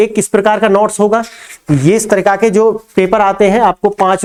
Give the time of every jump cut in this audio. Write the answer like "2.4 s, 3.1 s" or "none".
none